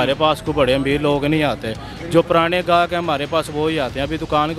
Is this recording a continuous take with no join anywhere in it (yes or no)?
yes